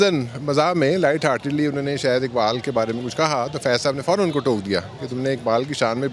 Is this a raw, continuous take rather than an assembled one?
yes; 0 cuts

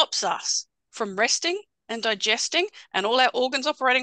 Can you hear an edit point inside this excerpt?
no; 0 cuts

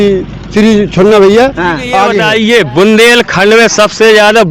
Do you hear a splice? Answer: yes; 1 cut; at 2.2 s

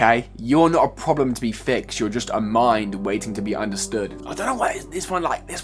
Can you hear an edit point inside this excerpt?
yes; 1 cut; at 4.2 s

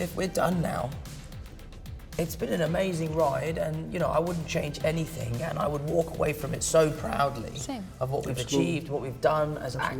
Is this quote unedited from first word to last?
yes; 0 cuts

